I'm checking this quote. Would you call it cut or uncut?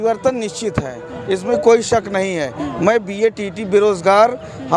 uncut